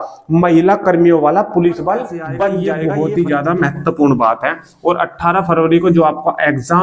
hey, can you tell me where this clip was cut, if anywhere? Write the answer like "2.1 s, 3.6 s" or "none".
2.8 s